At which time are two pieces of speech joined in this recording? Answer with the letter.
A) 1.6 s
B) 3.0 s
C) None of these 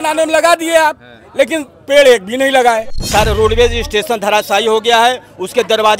B